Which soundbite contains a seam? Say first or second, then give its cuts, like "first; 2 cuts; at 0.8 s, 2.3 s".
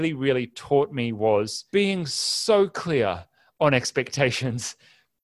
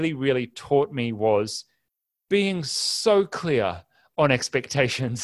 first; 1 cut; at 1.6 s